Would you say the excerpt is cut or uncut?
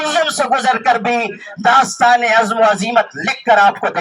uncut